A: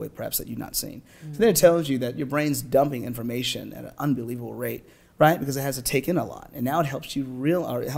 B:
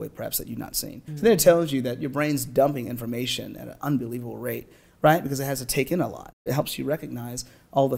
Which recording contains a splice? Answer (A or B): B